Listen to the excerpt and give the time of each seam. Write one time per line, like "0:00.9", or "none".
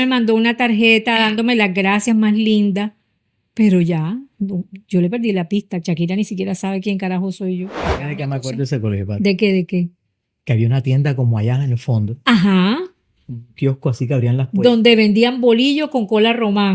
0:07.9

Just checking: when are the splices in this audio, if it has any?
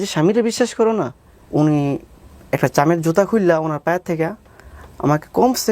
0:01.2

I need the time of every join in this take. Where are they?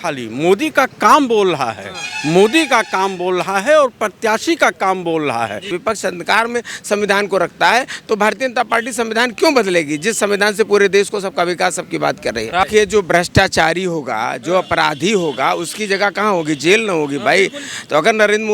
0:05.8
0:12.6

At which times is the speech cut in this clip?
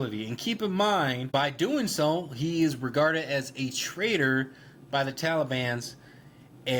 0:01.2

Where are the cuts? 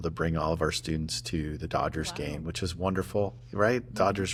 none

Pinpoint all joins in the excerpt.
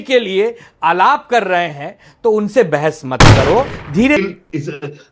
0:04.2

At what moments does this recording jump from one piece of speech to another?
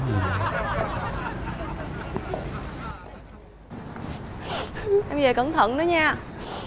0:03.7

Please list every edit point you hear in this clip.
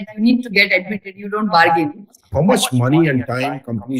0:02.2

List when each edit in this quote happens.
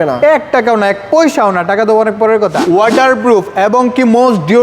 0:02.6

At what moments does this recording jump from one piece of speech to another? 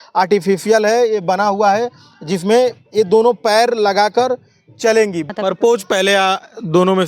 0:05.3

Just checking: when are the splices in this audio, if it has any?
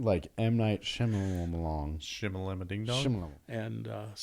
0:03.3

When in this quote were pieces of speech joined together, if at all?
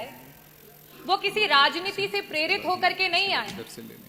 none

